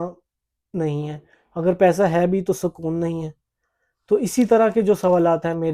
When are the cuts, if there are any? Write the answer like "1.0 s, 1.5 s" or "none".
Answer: none